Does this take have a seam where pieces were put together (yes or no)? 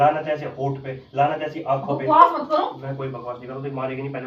no